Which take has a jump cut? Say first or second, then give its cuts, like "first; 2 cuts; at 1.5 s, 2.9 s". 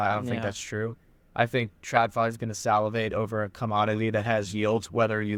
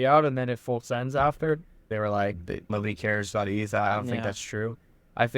second; 2 cuts; at 1.9 s, 2.7 s